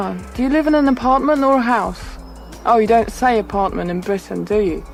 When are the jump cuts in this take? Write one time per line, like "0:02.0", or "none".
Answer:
none